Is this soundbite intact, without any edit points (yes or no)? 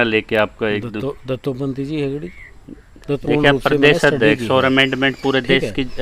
no